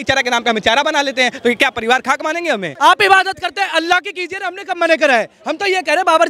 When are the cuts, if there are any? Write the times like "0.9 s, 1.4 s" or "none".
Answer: 2.7 s